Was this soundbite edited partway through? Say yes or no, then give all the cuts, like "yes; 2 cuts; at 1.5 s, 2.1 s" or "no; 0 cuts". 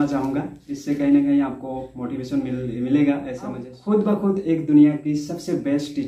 yes; 1 cut; at 3.7 s